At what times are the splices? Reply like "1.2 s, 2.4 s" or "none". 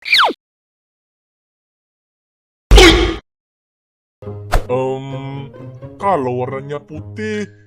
4.1 s